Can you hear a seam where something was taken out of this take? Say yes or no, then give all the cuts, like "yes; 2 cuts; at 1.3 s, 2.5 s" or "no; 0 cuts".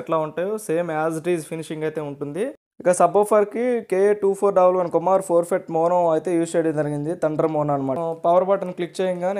yes; 2 cuts; at 2.7 s, 8.0 s